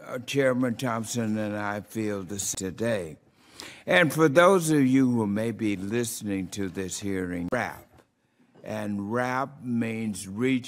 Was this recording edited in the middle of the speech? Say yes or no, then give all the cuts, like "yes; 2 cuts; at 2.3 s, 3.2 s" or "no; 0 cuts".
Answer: no; 0 cuts